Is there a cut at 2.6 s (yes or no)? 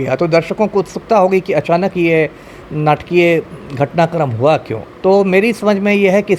no